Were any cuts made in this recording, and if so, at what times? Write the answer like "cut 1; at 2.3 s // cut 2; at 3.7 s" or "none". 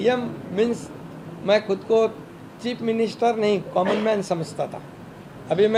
none